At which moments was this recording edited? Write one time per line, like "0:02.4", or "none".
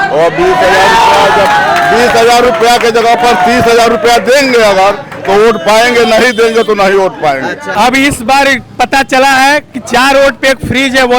0:07.7